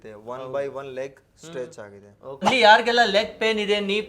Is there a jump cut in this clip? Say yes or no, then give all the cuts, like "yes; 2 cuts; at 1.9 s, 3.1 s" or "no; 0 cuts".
yes; 1 cut; at 2.3 s